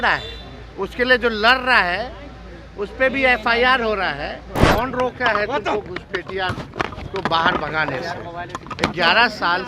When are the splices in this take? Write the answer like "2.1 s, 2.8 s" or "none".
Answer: 4.5 s